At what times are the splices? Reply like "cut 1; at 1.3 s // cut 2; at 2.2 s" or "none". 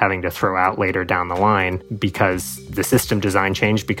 cut 1; at 1.9 s